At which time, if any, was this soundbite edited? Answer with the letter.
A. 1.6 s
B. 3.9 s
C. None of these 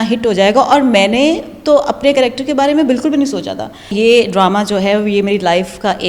B